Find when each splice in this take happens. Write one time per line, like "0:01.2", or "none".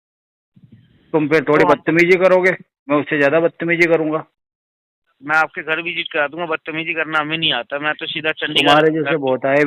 none